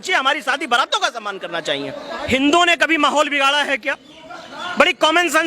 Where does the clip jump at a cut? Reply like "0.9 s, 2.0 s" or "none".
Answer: 2.2 s